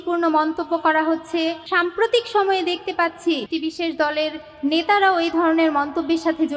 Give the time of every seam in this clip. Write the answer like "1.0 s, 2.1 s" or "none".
1.6 s, 3.5 s